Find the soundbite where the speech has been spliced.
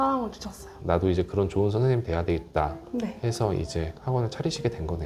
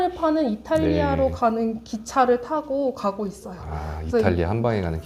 first; 2 cuts; at 0.8 s, 4.0 s

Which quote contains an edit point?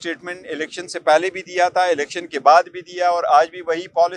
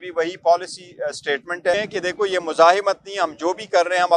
second; 1 cut; at 1.7 s

